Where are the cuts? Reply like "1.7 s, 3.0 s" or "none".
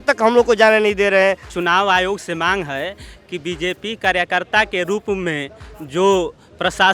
1.5 s